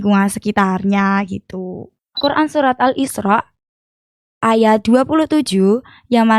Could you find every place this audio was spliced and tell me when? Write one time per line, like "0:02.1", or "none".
0:02.2